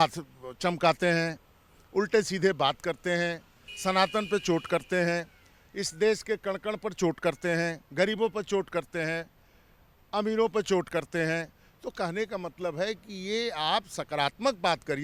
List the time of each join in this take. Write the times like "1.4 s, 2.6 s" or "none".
none